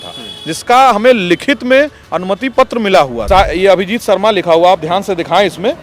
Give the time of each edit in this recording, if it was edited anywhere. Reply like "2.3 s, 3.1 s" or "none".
3.2 s